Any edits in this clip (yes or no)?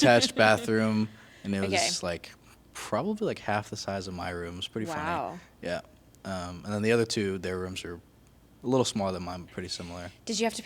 no